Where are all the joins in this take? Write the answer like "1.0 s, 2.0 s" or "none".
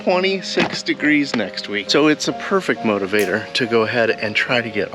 none